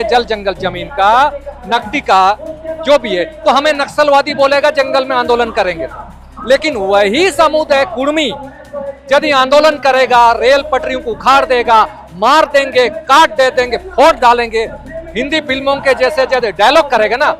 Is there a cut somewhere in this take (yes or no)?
no